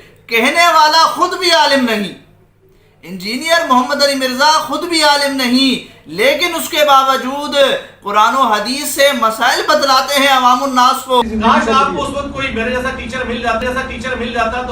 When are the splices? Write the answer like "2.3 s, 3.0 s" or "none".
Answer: 11.2 s, 13.6 s